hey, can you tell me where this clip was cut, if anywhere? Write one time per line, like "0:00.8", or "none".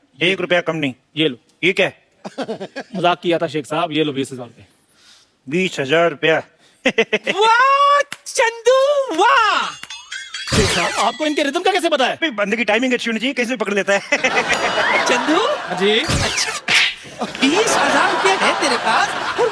none